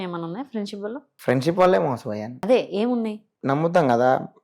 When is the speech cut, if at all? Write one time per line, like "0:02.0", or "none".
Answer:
0:03.3